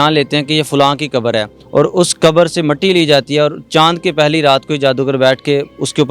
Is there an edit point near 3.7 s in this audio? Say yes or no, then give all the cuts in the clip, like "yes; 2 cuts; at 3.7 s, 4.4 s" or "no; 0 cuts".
no; 1 cut; at 1.6 s